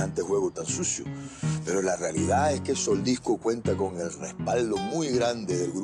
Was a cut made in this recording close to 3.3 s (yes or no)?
no